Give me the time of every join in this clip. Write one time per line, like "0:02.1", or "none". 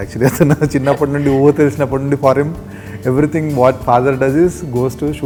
none